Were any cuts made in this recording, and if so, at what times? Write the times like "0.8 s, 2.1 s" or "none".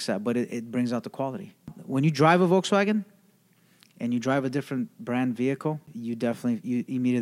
1.8 s, 5.9 s